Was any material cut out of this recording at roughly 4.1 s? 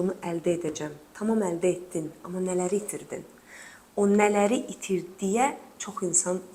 no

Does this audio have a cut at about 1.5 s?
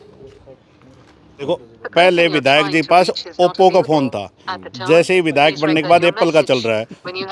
yes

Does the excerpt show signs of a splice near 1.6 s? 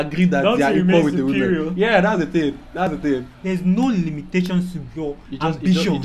no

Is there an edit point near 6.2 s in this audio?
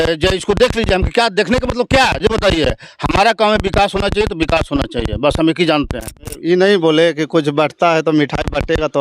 yes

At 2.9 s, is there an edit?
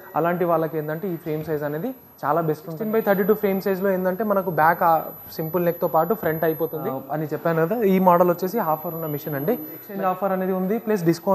yes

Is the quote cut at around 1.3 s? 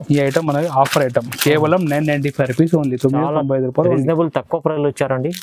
no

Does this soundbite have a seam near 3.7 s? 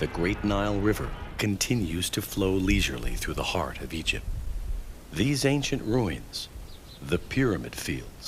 yes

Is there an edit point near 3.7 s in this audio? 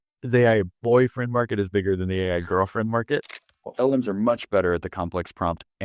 yes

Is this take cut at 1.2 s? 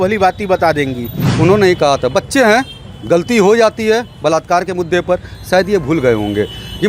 yes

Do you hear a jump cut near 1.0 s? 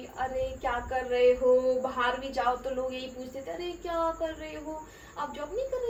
no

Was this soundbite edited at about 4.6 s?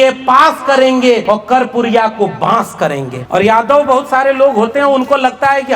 no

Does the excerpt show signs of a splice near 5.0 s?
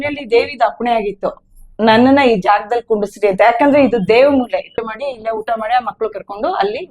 yes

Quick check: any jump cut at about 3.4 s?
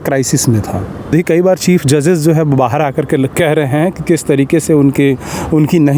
no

